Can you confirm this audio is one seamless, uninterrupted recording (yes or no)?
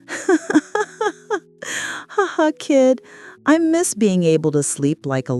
yes